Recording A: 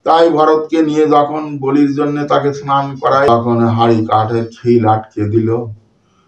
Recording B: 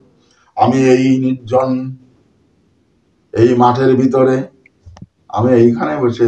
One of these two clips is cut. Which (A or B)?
A